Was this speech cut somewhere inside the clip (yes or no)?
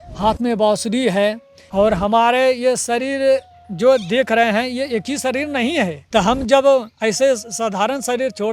yes